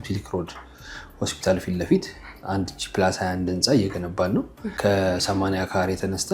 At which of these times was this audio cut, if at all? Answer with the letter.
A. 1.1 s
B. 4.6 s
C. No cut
B